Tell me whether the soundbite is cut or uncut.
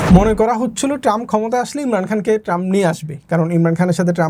uncut